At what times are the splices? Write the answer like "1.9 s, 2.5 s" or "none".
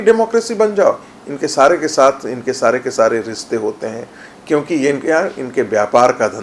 none